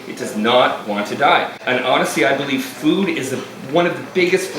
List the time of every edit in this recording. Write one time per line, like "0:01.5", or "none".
0:01.6